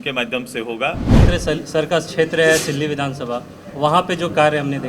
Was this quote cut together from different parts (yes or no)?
yes